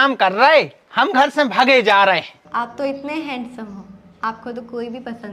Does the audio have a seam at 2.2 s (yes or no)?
yes